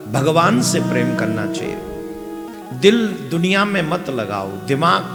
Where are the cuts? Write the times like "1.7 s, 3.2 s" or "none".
none